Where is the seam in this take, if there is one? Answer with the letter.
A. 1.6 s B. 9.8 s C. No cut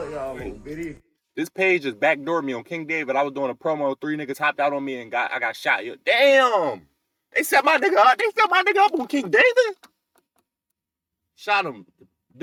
C